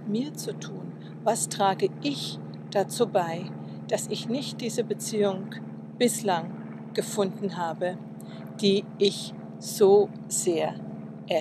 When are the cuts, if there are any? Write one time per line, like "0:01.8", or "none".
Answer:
0:08.5

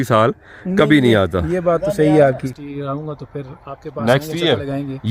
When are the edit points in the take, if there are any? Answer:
0:02.5

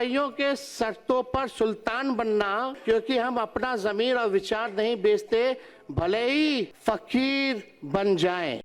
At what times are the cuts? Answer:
0:02.7
0:06.7

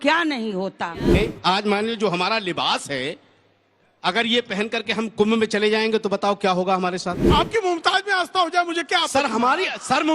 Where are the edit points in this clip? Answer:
0:01.2
0:07.3

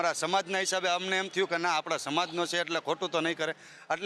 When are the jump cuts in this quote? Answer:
none

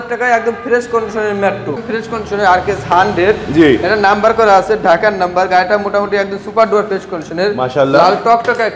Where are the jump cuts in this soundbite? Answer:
0:01.8

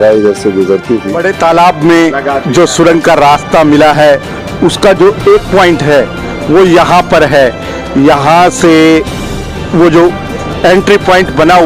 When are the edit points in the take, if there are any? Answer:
0:01.1

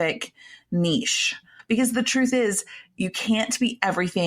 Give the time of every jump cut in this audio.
0:01.5

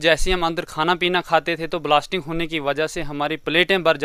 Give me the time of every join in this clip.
none

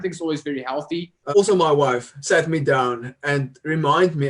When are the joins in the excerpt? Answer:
0:01.2

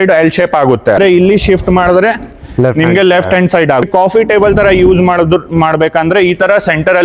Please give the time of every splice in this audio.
0:01.0
0:03.8

